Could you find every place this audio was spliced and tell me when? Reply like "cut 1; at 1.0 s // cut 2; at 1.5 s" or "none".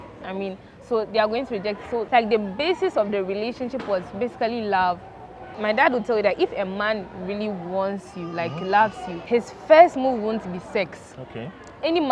cut 1; at 5.6 s

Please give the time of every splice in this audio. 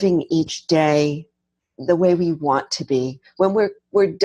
cut 1; at 1.7 s

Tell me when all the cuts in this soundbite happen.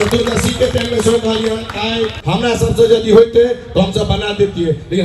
cut 1; at 2.2 s

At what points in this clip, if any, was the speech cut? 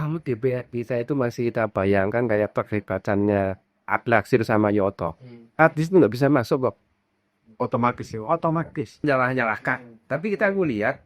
cut 1; at 9.0 s

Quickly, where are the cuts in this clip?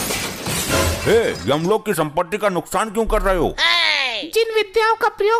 none

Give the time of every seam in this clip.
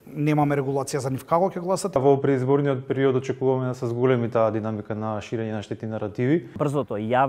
cut 1; at 2.0 s // cut 2; at 6.6 s

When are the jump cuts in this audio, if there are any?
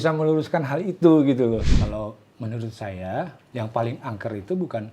cut 1; at 1.8 s // cut 2; at 3.4 s

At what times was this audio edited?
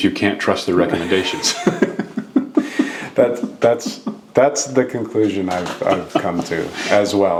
none

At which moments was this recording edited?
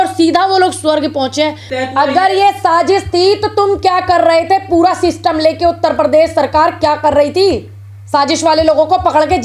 cut 1; at 1.7 s

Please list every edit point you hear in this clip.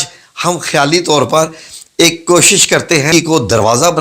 cut 1; at 3.1 s

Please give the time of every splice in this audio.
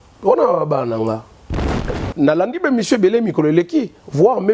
cut 1; at 1.9 s

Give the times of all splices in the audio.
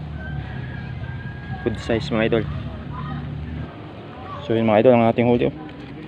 cut 1; at 3.7 s

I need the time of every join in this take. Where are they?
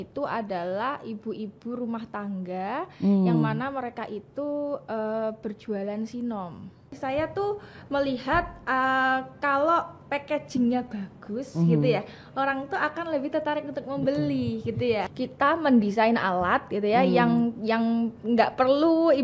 cut 1; at 6.9 s // cut 2; at 15.0 s

